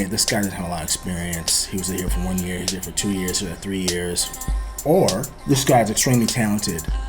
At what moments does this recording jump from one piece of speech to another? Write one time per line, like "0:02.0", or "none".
0:04.7
0:05.3